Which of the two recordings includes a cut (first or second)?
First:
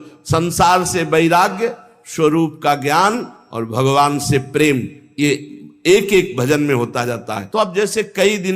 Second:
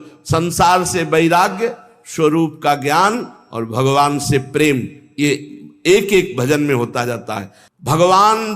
second